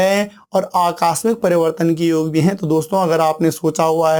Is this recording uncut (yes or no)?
yes